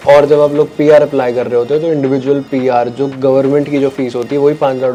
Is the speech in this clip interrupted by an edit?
no; 0 cuts

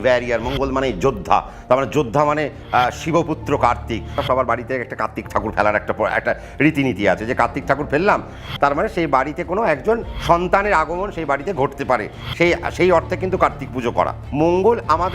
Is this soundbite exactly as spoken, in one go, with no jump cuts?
no; 4 cuts; at 4.2 s, 8.4 s, 10.1 s, 14.2 s

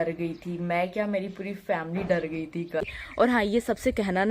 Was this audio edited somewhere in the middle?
yes; 1 cut; at 2.7 s

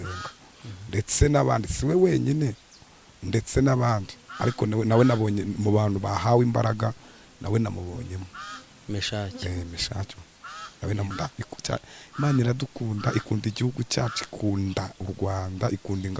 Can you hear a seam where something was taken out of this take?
yes; 1 cut; at 11.1 s

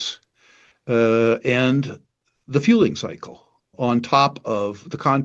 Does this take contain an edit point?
yes; 1 cut; at 3.7 s

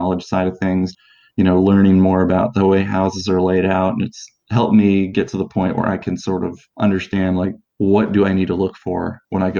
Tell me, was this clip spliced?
yes; 2 cuts; at 0.9 s, 6.6 s

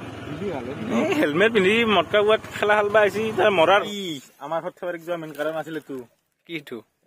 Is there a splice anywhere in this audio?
yes; 1 cut; at 3.8 s

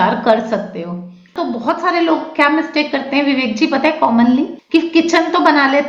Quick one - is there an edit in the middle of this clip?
yes; 2 cuts; at 1.4 s, 4.6 s

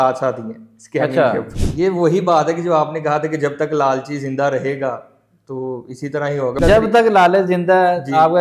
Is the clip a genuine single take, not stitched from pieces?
no; 2 cuts; at 1.6 s, 6.6 s

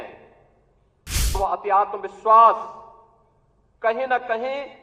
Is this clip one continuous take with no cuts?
no; 1 cut; at 1.3 s

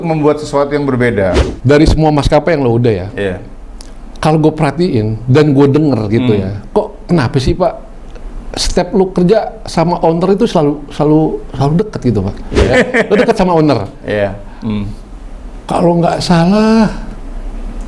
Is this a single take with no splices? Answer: no; 2 cuts; at 1.4 s, 12.7 s

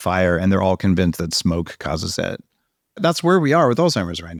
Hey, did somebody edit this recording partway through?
no; 0 cuts

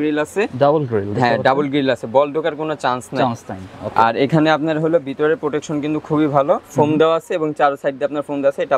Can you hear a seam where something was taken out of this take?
no; 0 cuts

